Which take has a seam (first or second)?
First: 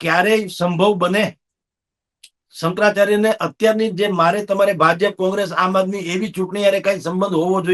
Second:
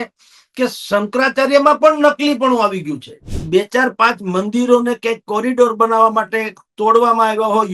second